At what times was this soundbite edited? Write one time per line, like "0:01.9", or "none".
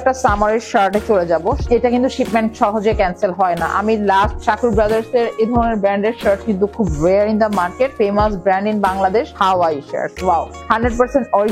0:01.6
0:04.4
0:07.9
0:09.3
0:10.6